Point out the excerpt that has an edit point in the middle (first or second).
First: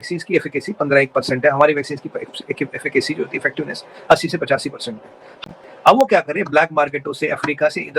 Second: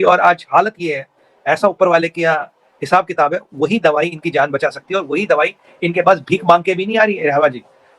first